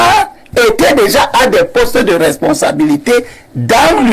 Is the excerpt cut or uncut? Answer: uncut